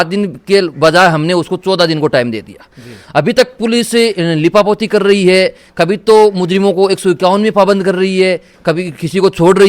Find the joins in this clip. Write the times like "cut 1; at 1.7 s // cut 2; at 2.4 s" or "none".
none